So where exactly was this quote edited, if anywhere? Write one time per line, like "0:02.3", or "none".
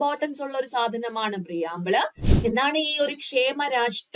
0:02.2